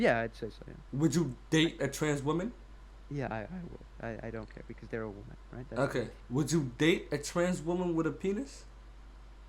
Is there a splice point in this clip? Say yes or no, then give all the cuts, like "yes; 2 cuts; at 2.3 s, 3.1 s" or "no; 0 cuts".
yes; 2 cuts; at 0.9 s, 6.2 s